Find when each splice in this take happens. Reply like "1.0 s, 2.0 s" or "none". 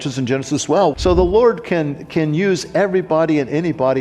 0.9 s